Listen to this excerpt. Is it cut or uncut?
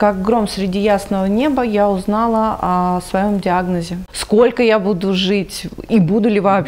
cut